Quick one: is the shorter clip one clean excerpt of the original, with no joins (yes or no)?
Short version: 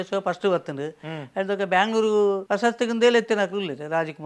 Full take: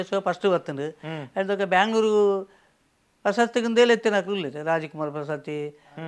no